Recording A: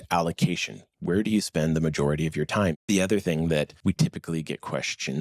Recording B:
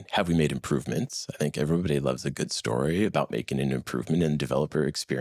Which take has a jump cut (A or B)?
A